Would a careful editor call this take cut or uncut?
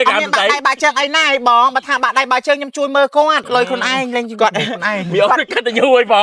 cut